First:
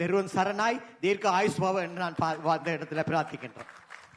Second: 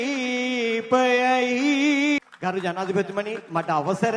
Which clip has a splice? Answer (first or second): second